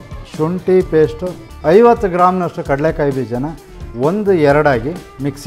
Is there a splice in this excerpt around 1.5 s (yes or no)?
yes